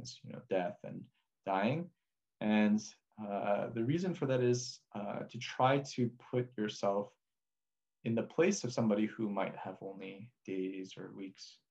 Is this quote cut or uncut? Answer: uncut